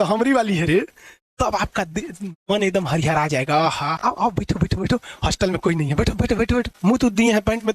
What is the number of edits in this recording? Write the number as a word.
two